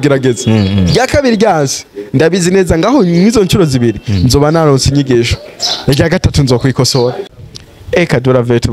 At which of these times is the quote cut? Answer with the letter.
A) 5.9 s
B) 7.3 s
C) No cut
B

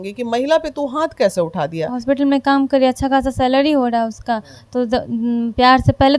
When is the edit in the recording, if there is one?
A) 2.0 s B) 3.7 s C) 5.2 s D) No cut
A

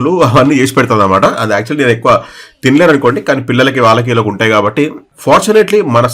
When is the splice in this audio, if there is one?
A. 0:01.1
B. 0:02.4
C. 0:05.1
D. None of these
C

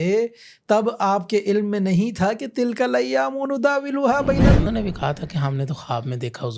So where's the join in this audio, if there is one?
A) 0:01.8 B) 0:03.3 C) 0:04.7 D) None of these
C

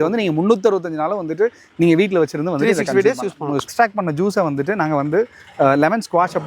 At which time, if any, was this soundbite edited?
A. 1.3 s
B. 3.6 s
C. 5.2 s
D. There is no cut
B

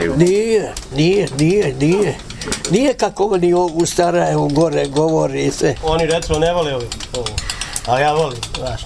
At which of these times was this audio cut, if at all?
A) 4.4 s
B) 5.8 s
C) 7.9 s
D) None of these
B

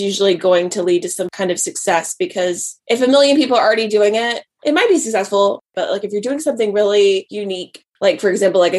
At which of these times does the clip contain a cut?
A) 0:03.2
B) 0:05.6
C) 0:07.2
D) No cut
D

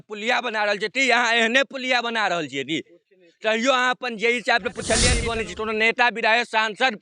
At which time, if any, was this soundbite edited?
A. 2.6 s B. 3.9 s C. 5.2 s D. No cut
C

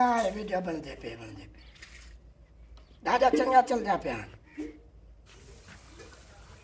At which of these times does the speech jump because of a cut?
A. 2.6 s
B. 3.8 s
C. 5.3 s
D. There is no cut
C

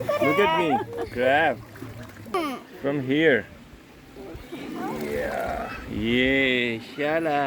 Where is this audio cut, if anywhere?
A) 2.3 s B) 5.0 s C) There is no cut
A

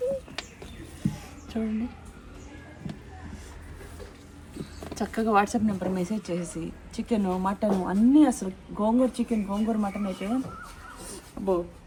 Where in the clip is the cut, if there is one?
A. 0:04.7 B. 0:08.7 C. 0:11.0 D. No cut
D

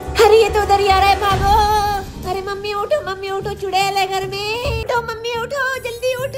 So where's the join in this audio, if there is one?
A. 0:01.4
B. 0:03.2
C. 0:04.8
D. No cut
C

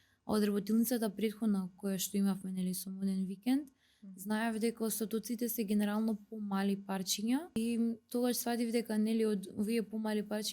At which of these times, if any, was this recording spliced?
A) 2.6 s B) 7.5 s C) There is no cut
B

